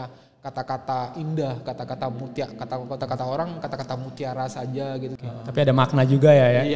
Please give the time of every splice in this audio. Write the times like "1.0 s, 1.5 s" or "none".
5.2 s